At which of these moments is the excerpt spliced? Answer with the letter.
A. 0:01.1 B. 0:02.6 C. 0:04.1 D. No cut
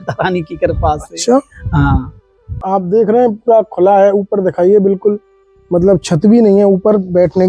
B